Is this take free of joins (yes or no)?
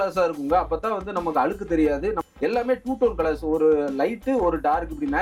no